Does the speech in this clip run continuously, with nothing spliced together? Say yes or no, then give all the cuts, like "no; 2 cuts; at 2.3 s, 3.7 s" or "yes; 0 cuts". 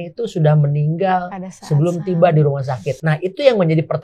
no; 1 cut; at 2.9 s